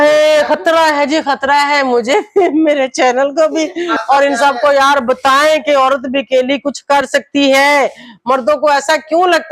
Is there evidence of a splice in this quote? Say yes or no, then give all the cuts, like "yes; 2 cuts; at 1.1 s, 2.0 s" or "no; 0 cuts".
yes; 1 cut; at 3.9 s